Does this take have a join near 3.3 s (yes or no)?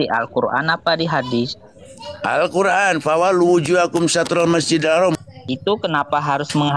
no